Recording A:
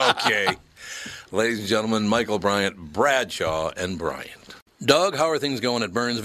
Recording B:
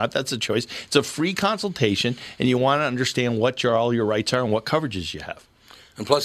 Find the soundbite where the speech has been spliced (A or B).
A